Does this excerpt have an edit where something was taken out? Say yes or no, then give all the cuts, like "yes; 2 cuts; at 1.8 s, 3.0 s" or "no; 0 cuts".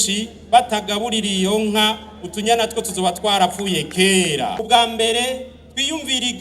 yes; 1 cut; at 4.6 s